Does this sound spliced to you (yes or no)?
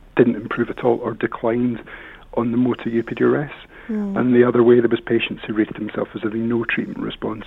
no